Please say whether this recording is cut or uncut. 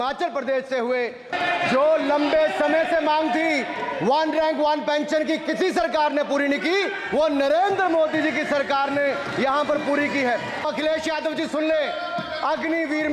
cut